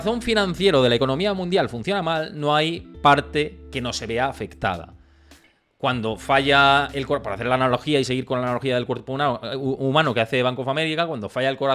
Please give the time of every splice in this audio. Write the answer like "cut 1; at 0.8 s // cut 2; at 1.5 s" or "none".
none